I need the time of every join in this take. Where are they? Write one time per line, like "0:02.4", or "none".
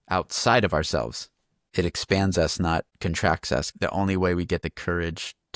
0:02.9
0:03.7
0:04.6